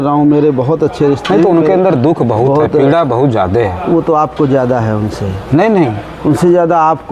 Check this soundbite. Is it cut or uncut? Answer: uncut